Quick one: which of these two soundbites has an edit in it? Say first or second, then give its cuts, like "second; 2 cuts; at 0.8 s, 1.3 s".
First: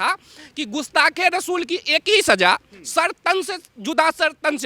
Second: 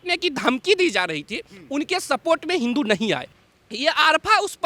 second; 1 cut; at 3.4 s